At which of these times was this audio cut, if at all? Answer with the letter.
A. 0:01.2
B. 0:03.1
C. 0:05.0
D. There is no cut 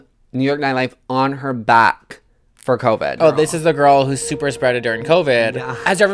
B